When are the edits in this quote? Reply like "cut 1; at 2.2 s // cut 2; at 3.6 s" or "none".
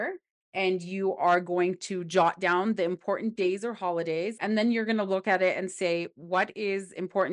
cut 1; at 4.4 s